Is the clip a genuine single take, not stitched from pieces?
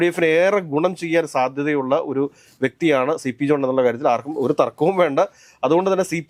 yes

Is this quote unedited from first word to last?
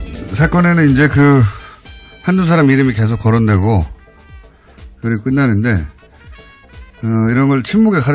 yes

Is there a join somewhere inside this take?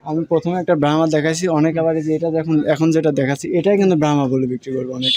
no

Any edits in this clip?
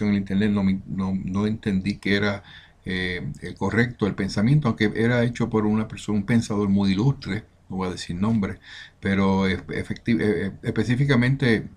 yes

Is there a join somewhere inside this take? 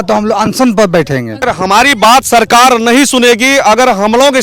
yes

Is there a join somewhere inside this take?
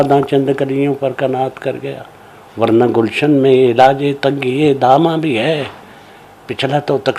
no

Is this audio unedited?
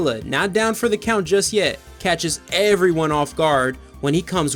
yes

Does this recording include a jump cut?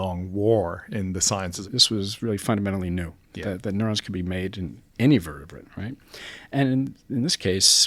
yes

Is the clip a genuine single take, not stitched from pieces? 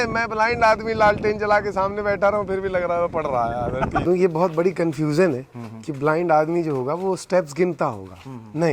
no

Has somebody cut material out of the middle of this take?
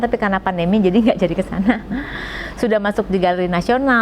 no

